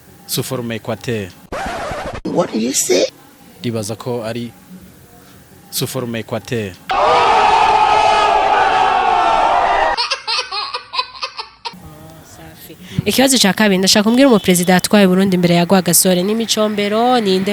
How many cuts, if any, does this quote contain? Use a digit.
1